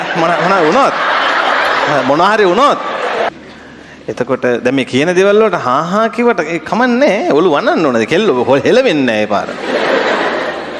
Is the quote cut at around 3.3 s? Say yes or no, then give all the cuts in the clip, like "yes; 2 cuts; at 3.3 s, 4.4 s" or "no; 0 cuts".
yes; 1 cut; at 3.3 s